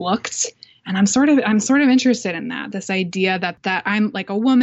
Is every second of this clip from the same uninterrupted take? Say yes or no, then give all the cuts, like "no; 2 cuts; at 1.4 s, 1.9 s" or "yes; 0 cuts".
yes; 0 cuts